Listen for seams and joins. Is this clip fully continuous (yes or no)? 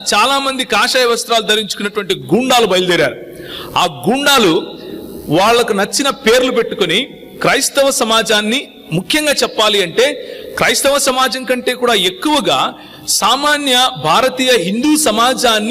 yes